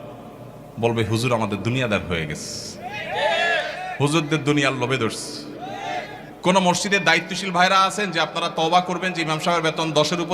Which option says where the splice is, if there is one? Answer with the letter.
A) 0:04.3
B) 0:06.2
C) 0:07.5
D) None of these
B